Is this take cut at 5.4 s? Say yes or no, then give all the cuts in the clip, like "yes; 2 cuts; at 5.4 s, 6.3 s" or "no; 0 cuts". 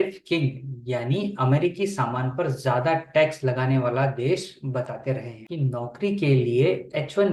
yes; 1 cut; at 5.4 s